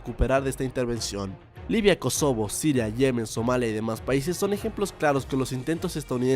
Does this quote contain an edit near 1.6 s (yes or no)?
no